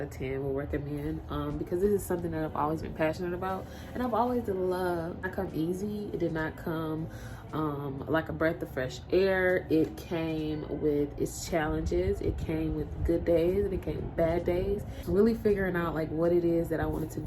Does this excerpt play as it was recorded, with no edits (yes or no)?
no